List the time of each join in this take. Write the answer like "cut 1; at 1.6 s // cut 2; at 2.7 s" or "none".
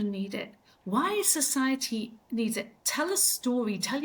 none